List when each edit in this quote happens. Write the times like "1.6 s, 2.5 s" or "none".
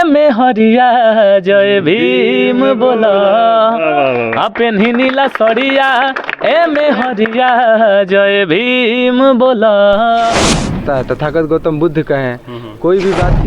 10.8 s